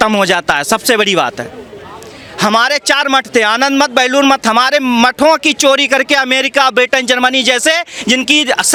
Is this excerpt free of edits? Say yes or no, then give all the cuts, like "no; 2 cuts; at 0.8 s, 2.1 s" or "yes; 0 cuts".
yes; 0 cuts